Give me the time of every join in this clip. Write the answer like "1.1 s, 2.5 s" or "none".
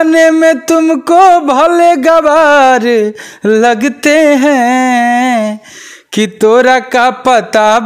none